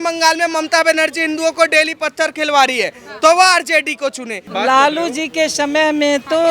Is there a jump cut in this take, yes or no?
yes